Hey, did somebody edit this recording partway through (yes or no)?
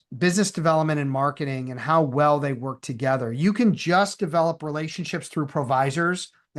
no